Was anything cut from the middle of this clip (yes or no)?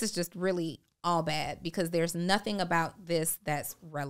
no